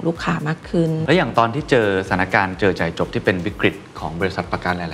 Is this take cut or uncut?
cut